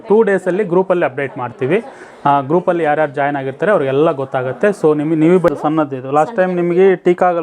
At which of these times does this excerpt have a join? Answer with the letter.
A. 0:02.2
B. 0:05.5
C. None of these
B